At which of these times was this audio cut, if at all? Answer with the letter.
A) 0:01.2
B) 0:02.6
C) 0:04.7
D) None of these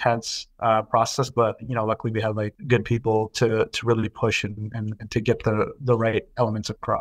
B